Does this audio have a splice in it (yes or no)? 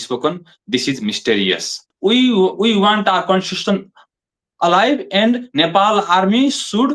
yes